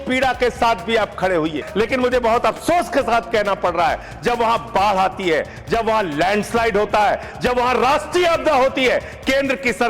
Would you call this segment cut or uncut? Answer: cut